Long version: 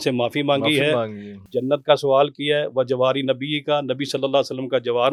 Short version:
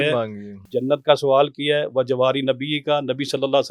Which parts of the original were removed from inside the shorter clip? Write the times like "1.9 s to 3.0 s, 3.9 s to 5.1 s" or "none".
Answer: none